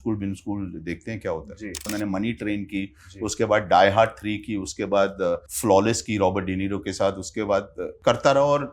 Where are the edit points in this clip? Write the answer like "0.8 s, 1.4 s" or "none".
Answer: 1.9 s, 5.5 s, 7.8 s